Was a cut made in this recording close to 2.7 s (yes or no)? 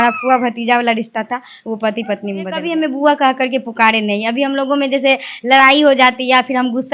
yes